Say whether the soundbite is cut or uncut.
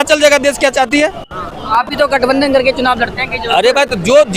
uncut